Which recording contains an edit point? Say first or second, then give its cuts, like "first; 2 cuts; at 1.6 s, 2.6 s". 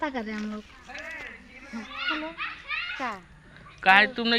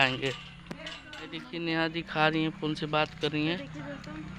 second; 1 cut; at 1.4 s